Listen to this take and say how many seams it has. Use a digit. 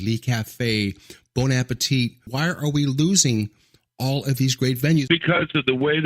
2